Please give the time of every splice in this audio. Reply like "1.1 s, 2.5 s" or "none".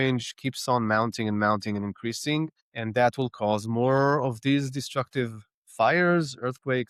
none